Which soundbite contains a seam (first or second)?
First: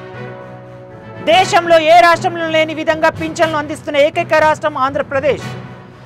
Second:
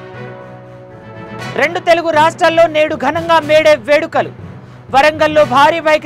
first